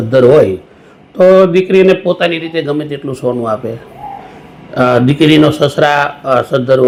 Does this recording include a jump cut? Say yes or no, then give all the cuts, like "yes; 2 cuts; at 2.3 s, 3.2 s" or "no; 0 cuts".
no; 0 cuts